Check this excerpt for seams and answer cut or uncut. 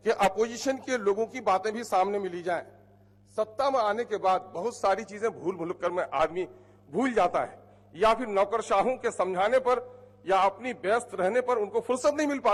uncut